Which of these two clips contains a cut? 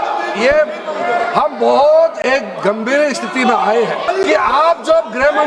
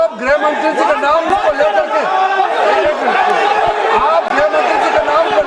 first; 1 cut; at 4.0 s

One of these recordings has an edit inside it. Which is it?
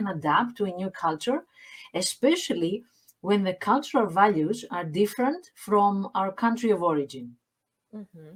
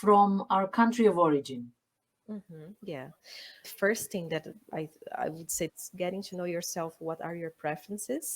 second; 2 cuts; at 3.7 s, 5.8 s

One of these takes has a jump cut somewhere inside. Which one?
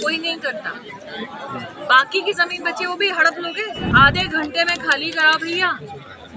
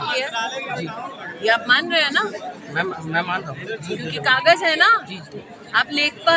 first; 1 cut; at 3.8 s

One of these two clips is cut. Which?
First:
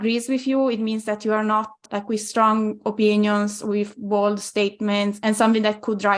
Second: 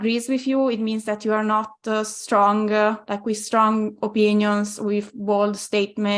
first; 2 cuts; at 1.8 s, 5.2 s

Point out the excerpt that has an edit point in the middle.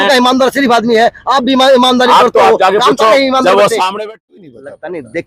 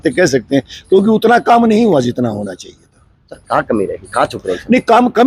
first; 1 cut; at 4.2 s

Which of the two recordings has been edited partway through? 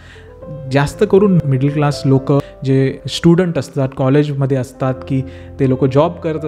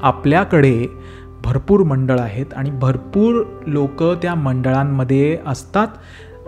first; 2 cuts; at 1.4 s, 2.8 s

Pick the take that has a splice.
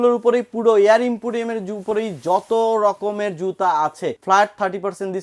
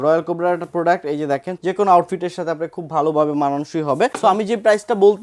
second; 2 cuts; at 1.5 s, 4.1 s

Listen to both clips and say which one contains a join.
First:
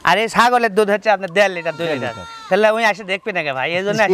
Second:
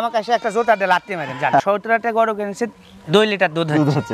second; 1 cut; at 1.6 s

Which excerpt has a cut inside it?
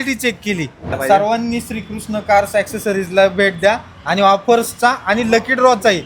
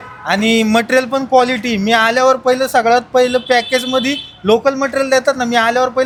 first; 1 cut; at 1.0 s

